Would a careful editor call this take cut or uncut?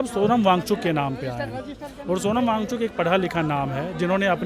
uncut